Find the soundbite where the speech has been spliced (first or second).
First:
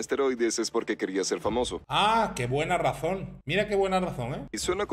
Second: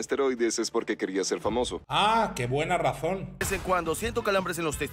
second